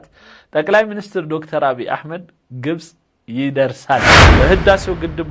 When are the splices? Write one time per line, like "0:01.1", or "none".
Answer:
0:04.2